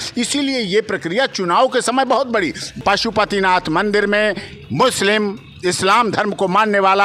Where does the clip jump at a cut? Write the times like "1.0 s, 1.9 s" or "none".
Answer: 2.7 s